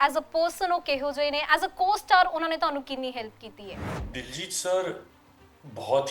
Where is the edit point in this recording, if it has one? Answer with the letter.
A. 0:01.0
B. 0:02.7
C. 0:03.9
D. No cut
C